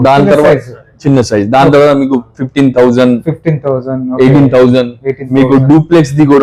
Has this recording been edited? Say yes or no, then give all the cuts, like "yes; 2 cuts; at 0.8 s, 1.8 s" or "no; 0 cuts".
no; 0 cuts